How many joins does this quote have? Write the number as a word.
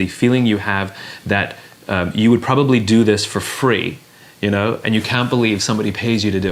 zero